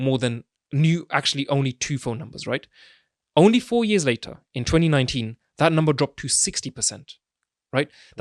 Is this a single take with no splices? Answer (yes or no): yes